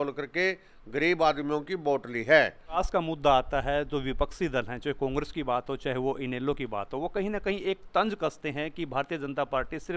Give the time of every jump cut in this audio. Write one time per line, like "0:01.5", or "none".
0:02.8